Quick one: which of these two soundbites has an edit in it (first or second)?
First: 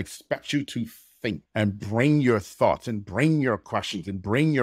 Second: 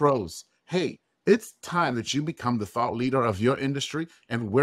first